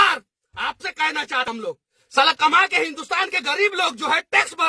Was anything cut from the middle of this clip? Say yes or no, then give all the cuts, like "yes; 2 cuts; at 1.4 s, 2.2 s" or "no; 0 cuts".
yes; 1 cut; at 1.5 s